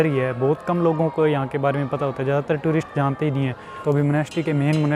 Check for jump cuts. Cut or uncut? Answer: cut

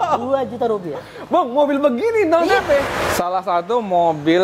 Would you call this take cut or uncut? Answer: cut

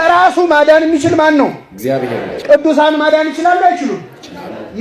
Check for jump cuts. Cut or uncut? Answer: uncut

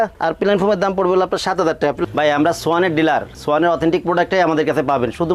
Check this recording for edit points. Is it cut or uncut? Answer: cut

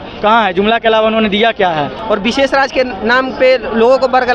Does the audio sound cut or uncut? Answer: cut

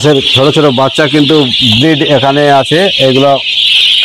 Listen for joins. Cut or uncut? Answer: uncut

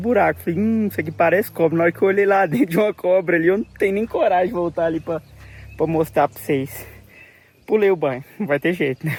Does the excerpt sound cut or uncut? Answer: uncut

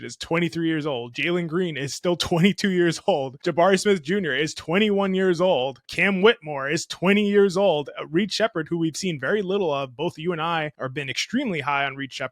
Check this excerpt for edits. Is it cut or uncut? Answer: cut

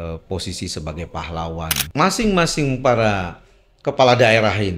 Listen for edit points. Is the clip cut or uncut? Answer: cut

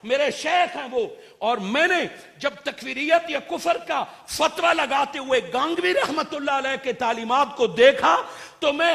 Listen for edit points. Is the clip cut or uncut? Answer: uncut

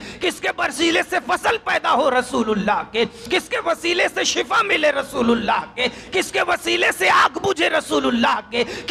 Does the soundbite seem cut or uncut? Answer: uncut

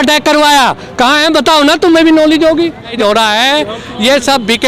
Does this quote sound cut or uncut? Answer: cut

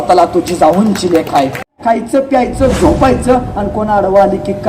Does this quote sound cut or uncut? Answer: cut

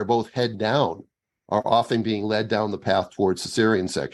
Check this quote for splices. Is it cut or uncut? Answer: uncut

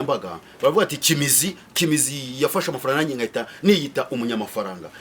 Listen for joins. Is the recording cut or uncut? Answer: uncut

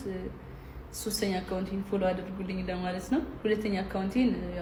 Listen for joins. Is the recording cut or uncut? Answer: uncut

